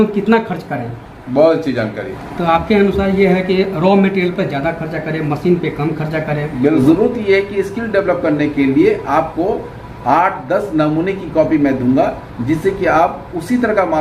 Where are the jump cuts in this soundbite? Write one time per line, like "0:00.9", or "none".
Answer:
0:02.2
0:06.8